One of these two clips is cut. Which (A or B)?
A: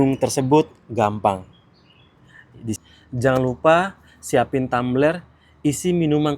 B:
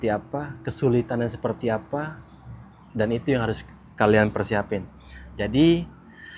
A